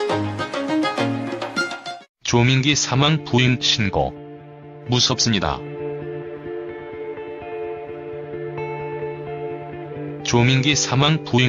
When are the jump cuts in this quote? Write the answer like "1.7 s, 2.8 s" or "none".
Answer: none